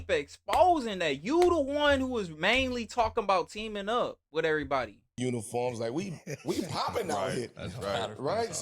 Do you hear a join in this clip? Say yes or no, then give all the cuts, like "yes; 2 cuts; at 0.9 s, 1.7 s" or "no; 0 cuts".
yes; 1 cut; at 5.2 s